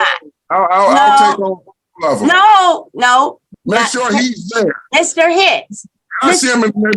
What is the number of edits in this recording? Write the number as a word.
one